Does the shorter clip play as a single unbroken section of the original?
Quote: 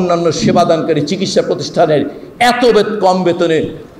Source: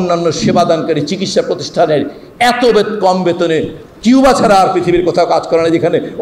yes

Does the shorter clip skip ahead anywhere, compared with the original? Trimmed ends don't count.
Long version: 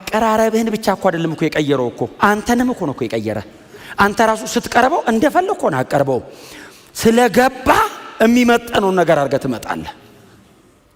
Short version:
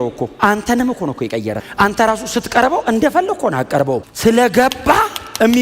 yes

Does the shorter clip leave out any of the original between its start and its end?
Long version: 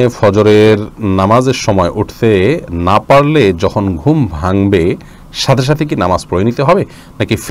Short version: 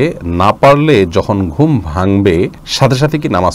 yes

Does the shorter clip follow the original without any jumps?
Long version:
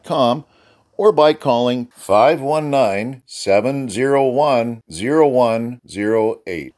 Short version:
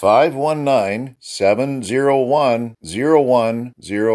yes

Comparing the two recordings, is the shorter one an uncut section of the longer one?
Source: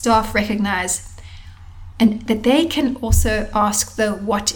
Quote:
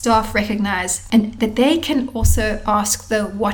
no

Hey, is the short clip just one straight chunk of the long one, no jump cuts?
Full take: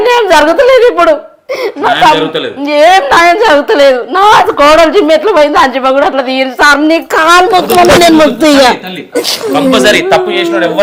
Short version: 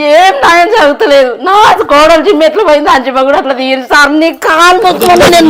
yes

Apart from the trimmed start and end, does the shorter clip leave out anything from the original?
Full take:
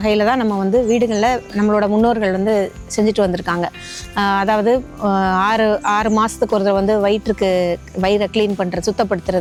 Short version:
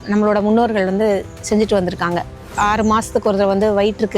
yes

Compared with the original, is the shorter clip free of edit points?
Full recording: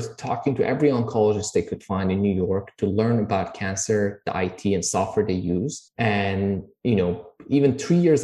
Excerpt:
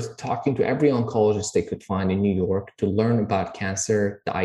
yes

